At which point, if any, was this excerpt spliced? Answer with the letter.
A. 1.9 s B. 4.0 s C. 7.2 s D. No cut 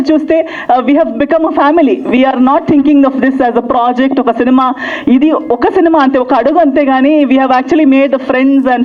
D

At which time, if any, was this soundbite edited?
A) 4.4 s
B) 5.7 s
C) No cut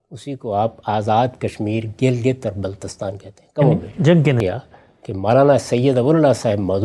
A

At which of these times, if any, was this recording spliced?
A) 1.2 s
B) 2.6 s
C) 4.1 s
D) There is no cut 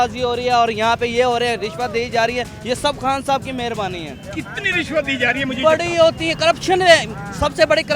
D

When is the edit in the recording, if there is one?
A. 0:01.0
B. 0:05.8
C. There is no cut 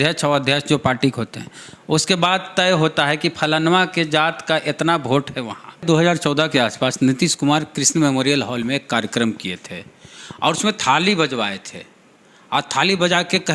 B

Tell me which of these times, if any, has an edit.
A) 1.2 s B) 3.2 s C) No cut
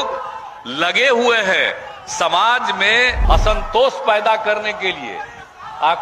B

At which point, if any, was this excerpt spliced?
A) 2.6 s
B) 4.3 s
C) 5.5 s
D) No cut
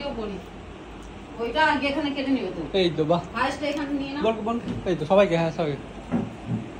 D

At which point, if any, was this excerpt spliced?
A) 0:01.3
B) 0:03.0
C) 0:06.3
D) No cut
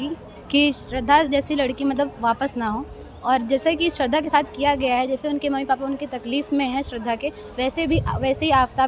D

